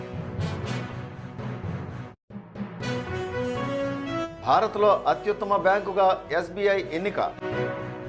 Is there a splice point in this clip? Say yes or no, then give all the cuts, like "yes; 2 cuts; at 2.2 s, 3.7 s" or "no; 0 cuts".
no; 0 cuts